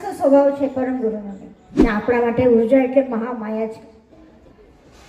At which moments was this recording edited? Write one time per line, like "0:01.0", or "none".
0:01.8